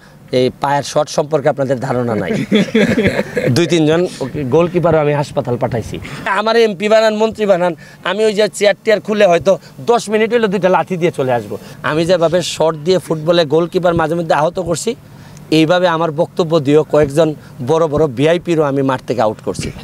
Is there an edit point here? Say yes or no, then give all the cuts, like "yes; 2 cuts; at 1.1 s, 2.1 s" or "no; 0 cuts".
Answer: yes; 2 cuts; at 6.3 s, 11.7 s